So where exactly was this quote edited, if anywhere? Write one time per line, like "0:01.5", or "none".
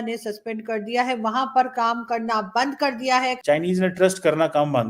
0:03.4